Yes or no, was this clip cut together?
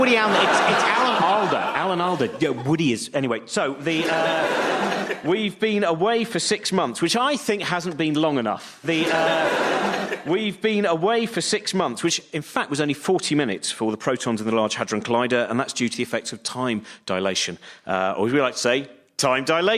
no